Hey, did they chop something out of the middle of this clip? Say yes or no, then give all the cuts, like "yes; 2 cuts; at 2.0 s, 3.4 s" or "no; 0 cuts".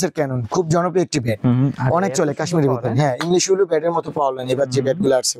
no; 0 cuts